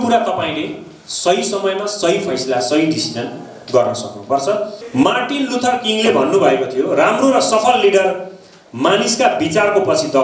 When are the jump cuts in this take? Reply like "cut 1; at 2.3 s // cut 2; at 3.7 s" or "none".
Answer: cut 1; at 4.8 s